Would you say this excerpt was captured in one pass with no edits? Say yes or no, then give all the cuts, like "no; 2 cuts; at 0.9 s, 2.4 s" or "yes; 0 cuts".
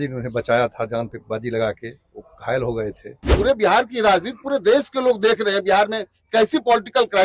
no; 1 cut; at 3.3 s